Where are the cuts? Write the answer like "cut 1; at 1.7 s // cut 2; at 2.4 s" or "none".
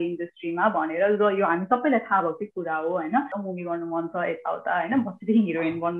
cut 1; at 3.3 s